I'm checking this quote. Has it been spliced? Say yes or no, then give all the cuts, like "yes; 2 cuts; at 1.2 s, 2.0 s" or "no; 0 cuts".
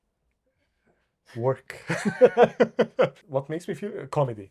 yes; 1 cut; at 3.2 s